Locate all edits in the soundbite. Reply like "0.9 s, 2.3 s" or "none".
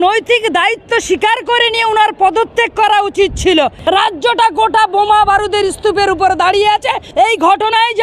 3.8 s, 7.1 s